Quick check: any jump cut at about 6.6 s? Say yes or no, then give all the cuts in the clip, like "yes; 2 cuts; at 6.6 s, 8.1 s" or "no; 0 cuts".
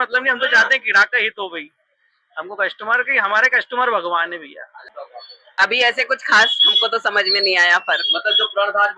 no; 1 cut; at 4.7 s